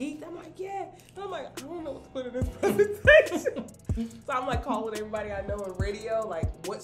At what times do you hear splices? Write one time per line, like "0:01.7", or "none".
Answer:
none